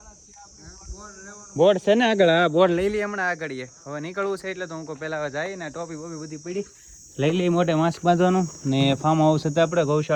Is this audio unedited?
yes; 0 cuts

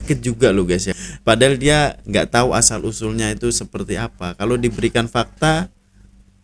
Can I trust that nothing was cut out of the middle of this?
no; 1 cut; at 0.9 s

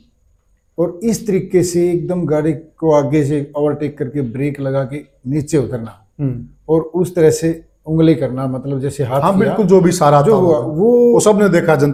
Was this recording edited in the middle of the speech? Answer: no; 0 cuts

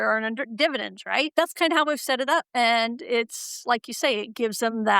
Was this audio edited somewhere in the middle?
yes; 2 cuts; at 1.3 s, 2.5 s

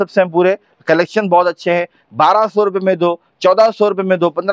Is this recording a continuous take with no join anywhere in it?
yes; 0 cuts

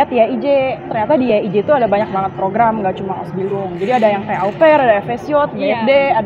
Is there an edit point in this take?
yes; 1 cut; at 0.9 s

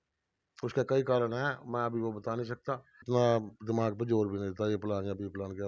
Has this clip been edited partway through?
yes; 1 cut; at 3.1 s

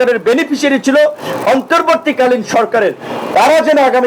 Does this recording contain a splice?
no; 0 cuts

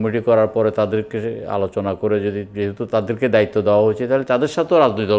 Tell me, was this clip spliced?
no; 0 cuts

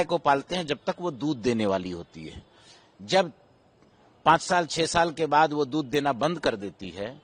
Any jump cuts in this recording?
no; 0 cuts

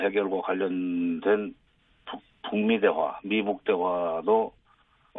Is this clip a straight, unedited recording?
yes; 0 cuts

